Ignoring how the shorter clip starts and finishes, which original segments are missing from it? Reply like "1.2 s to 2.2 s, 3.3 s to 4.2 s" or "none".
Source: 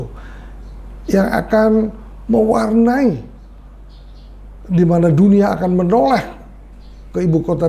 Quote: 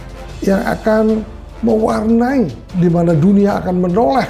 3.3 s to 4.6 s